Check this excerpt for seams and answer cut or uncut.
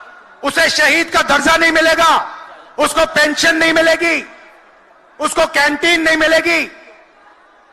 uncut